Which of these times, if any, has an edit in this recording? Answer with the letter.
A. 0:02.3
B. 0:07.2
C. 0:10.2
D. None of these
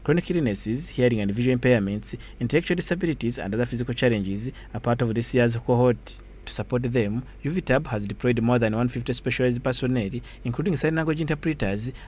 D